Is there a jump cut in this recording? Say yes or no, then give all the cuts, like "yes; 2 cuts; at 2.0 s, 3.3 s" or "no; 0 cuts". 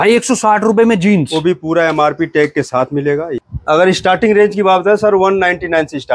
yes; 1 cut; at 3.5 s